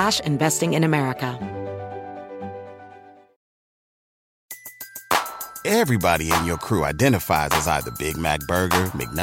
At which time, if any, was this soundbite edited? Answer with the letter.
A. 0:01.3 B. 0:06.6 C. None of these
A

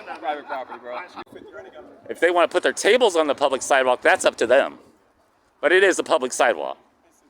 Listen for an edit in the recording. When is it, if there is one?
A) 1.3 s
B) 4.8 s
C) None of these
A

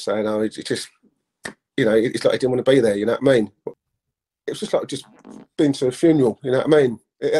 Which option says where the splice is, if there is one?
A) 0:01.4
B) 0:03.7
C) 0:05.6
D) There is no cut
B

